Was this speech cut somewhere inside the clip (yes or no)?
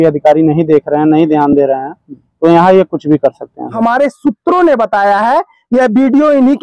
yes